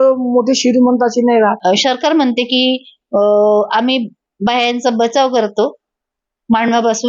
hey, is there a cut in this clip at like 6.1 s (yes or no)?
no